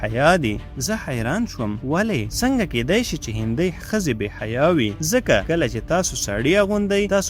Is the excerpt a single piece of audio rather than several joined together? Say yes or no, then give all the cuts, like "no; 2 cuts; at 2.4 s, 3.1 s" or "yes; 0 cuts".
yes; 0 cuts